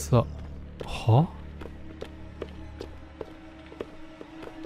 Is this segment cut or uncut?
uncut